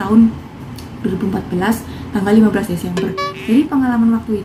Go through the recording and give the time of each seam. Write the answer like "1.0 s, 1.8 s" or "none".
none